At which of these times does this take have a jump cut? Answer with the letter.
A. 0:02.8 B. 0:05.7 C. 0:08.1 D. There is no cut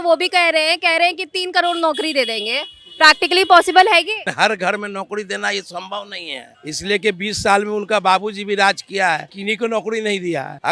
D